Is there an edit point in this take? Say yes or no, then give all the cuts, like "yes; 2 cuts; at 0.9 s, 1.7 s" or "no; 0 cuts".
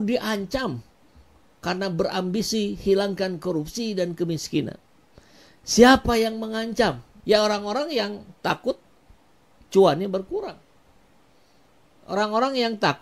yes; 1 cut; at 7.1 s